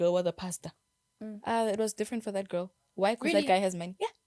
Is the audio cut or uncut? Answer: uncut